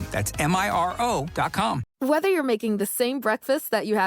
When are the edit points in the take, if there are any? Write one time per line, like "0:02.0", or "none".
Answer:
0:01.9

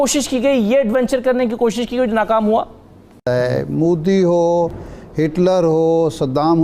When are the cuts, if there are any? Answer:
0:03.2

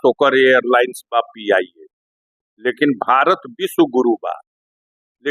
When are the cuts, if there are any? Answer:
none

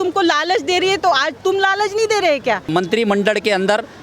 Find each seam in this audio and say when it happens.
0:02.6

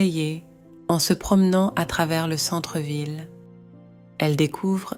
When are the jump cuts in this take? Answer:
none

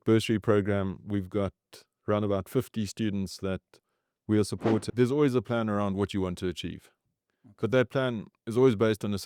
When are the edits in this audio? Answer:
0:04.8

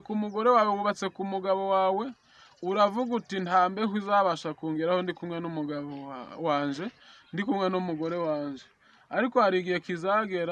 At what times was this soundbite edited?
none

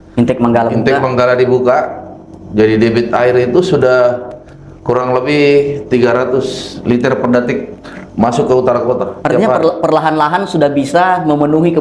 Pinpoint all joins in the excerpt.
none

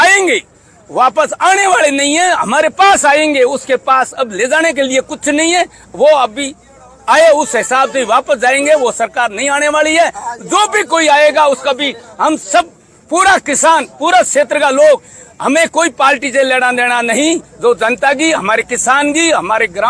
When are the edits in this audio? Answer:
none

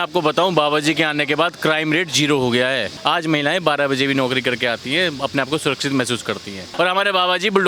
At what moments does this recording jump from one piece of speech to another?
0:02.9
0:06.7

